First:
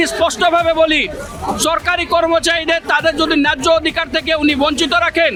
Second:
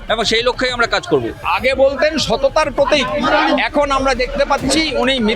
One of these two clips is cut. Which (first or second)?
second